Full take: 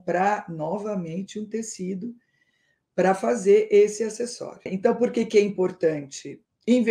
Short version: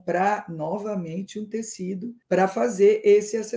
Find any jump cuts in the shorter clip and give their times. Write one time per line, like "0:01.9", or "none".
0:02.2